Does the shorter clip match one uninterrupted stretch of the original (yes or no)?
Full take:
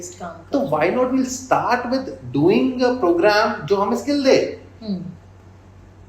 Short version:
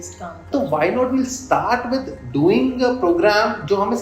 yes